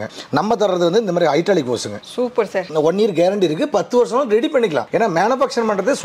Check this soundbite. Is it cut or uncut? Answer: cut